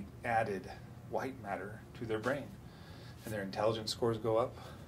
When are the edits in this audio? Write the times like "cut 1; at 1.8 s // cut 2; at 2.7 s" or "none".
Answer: none